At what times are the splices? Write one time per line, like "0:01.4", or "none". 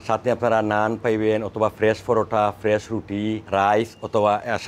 0:03.4